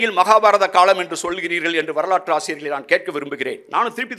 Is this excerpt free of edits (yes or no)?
yes